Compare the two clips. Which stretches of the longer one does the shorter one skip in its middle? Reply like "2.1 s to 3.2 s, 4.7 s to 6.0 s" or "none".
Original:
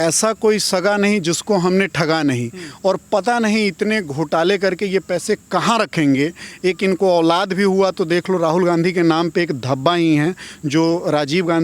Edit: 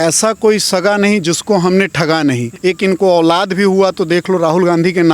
2.5 s to 6.5 s